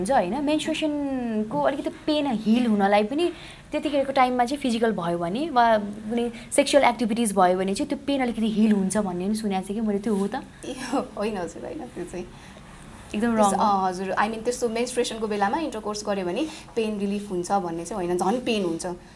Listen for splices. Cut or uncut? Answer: uncut